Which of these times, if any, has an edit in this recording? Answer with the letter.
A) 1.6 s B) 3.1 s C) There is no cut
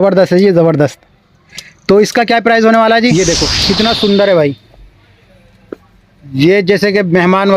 B